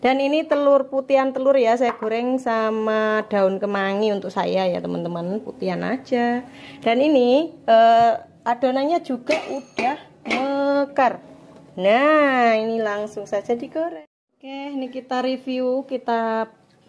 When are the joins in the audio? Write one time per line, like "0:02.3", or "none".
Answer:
0:13.9